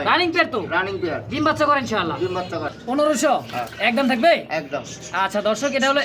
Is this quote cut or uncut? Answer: cut